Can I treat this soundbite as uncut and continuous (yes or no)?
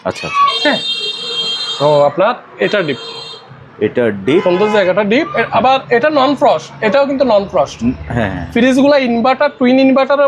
yes